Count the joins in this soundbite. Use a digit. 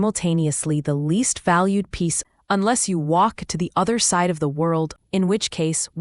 2